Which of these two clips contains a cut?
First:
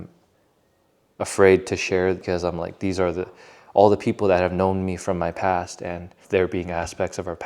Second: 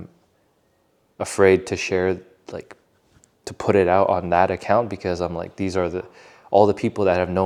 first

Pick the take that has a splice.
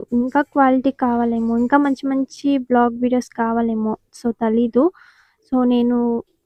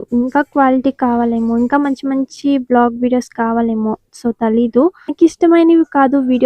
second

